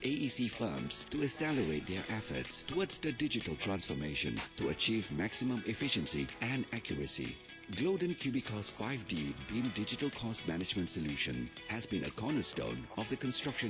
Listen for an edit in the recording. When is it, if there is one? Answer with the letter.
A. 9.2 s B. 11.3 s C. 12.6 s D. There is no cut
A